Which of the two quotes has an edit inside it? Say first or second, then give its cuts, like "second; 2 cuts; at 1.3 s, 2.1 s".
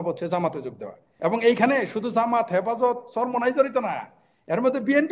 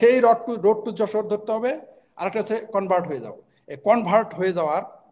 first; 1 cut; at 1.1 s